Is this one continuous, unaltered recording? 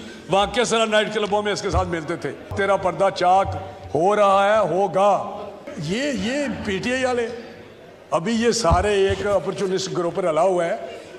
no; 2 cuts; at 2.5 s, 5.7 s

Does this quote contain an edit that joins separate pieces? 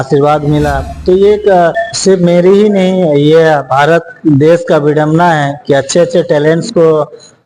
yes; 1 cut; at 1.9 s

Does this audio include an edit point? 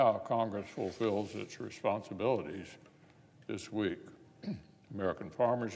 yes; 1 cut; at 2.4 s

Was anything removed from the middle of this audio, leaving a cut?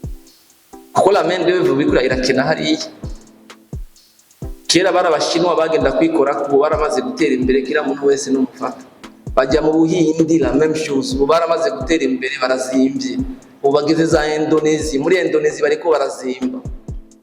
yes; 1 cut; at 0.9 s

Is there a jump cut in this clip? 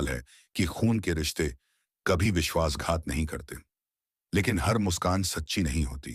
no; 0 cuts

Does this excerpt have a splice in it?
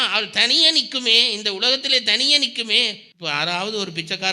yes; 1 cut; at 3.1 s

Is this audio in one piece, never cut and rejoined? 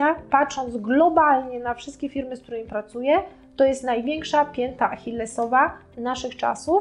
yes; 0 cuts

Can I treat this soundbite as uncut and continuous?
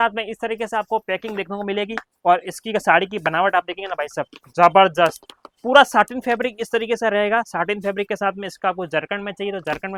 yes; 0 cuts

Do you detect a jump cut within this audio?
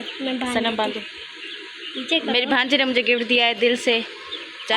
no; 0 cuts

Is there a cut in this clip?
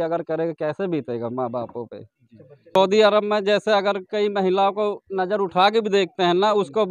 yes; 1 cut; at 2.8 s

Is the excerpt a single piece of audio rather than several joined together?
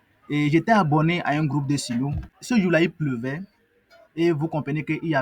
no; 1 cut; at 2.2 s

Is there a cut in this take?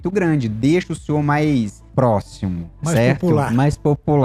yes; 1 cut; at 1.8 s

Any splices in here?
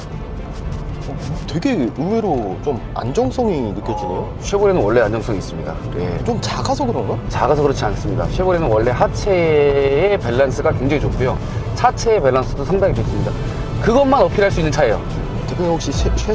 no; 0 cuts

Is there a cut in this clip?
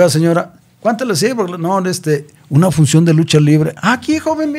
no; 0 cuts

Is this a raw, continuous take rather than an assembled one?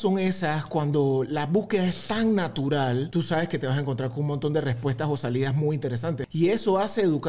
no; 2 cuts; at 3.1 s, 6.3 s

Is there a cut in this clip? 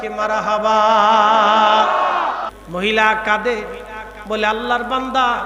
yes; 1 cut; at 2.5 s

